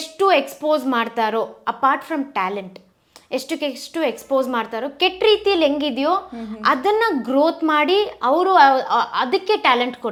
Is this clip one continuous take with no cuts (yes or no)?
yes